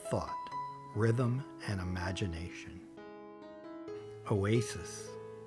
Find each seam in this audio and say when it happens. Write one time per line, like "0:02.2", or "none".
0:02.5
0:04.1